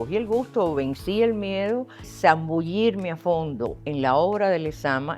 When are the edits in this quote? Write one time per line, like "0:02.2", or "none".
0:02.1